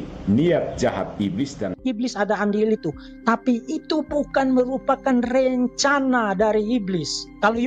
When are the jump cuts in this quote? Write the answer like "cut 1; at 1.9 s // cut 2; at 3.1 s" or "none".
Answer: cut 1; at 1.6 s